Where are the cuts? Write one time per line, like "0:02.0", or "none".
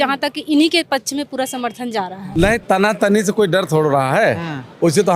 0:02.2